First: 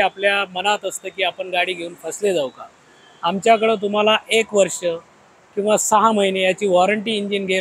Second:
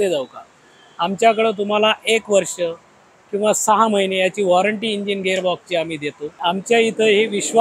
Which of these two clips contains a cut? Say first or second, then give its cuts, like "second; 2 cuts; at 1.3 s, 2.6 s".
second; 1 cut; at 6.4 s